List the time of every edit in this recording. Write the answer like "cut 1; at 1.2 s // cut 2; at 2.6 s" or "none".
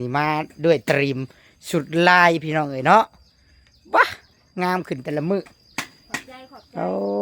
none